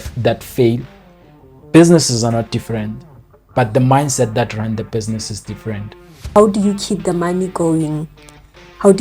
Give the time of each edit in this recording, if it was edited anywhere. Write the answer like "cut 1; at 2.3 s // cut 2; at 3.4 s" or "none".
cut 1; at 6.4 s